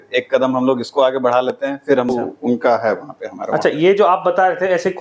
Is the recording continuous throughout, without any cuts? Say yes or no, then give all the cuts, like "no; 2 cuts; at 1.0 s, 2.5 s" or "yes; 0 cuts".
no; 1 cut; at 2.1 s